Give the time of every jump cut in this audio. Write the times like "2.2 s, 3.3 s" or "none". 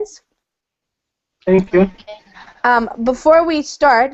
none